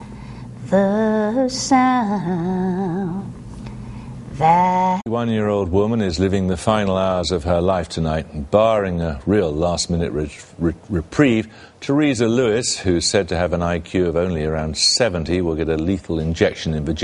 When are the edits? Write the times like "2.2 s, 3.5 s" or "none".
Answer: none